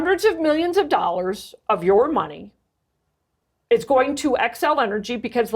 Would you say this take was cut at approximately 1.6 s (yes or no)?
no